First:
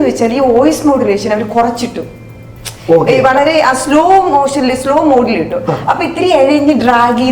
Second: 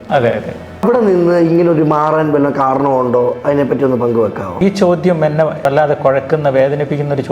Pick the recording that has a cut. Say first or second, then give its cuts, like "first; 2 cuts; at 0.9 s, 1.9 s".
second; 3 cuts; at 0.8 s, 4.6 s, 5.7 s